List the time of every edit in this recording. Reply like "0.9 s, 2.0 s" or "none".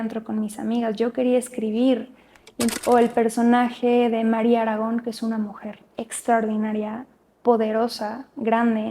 2.7 s